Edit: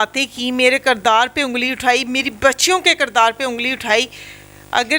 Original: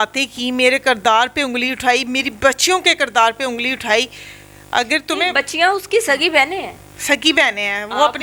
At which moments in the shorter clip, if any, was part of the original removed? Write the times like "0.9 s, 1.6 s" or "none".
none